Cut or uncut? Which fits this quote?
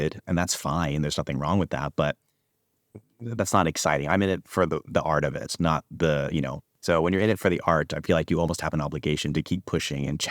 cut